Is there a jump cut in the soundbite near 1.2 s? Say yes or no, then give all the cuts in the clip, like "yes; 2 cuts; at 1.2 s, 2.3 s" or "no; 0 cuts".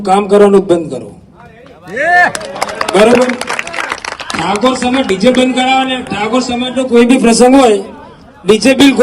no; 0 cuts